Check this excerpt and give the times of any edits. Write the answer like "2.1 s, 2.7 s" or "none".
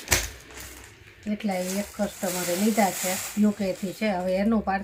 none